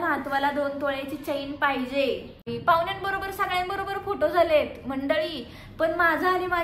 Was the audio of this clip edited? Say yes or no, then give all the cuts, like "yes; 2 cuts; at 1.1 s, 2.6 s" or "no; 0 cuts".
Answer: yes; 1 cut; at 2.5 s